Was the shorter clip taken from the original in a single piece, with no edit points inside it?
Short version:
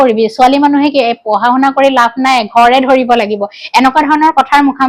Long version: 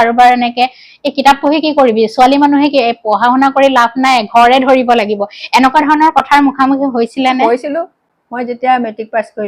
yes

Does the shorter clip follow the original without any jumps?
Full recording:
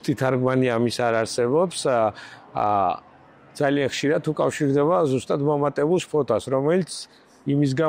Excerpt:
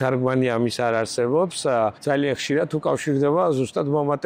no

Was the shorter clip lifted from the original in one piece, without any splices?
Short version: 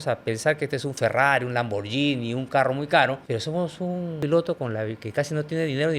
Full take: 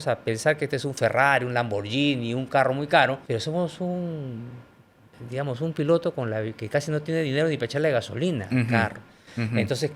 no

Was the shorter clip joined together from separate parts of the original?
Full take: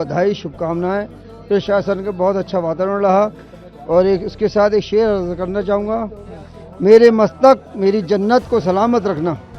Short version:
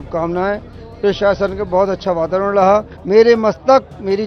yes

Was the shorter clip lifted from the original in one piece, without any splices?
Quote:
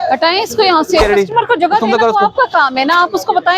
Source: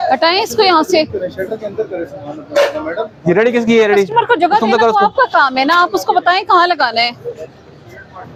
no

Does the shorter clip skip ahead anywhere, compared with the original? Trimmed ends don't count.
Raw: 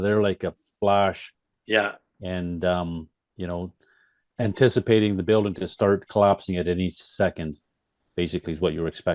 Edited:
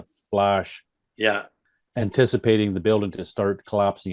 yes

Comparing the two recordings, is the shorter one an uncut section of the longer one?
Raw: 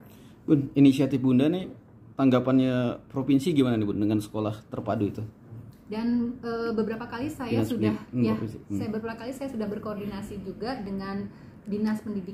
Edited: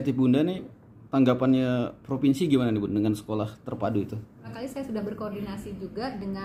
no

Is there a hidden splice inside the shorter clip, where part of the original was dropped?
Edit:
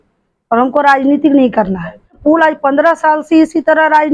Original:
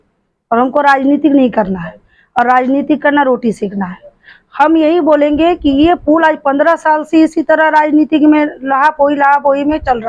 yes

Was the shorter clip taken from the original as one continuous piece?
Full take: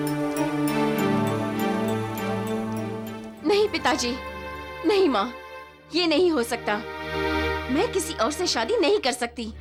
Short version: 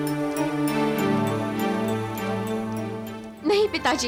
yes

